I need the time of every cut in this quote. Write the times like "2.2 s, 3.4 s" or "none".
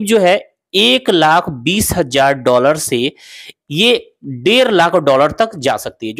none